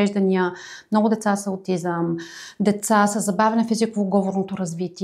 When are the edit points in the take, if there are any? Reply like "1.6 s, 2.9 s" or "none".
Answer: none